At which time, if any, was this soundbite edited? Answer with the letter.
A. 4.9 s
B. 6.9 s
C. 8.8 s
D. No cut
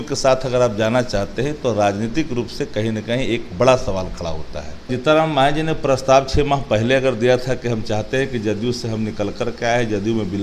A